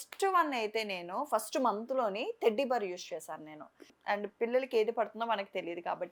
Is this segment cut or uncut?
cut